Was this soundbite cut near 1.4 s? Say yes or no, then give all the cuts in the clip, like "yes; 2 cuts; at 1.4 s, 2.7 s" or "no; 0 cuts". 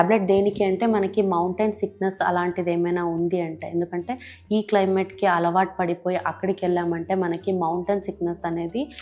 no; 0 cuts